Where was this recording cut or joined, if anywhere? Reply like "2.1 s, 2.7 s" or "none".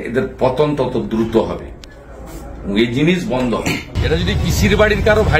3.9 s